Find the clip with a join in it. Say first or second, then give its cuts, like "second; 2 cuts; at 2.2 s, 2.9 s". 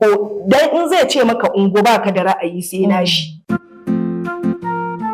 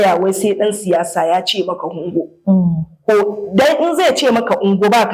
first; 1 cut; at 3.3 s